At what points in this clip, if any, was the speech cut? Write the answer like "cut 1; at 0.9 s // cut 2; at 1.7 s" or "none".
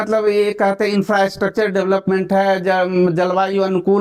none